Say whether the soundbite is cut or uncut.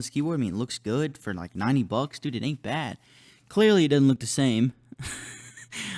uncut